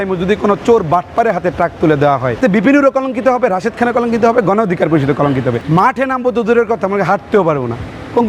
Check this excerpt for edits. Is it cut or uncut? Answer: cut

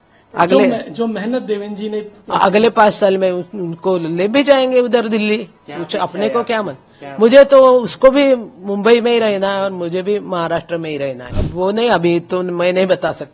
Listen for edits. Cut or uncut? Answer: cut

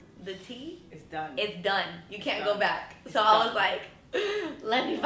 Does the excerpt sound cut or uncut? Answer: uncut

